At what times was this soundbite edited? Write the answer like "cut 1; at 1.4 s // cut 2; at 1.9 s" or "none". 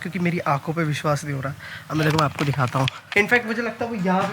cut 1; at 3.0 s